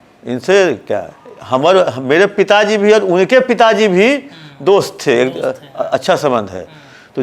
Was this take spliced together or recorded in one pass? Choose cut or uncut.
uncut